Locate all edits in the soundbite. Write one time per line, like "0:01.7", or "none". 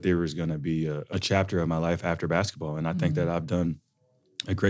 0:01.0